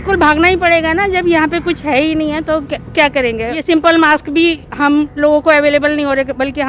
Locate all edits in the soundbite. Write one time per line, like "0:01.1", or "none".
0:03.6